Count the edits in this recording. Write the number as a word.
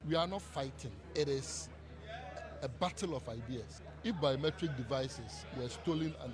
two